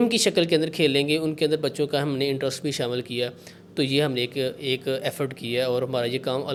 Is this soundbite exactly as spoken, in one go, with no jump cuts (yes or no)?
yes